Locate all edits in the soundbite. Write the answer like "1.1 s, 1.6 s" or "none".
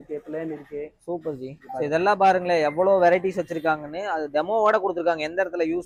none